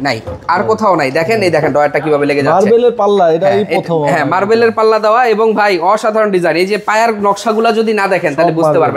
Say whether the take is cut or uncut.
uncut